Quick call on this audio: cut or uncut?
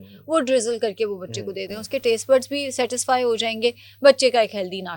uncut